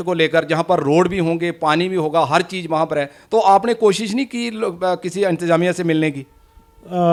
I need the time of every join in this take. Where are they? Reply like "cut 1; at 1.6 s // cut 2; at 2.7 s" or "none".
none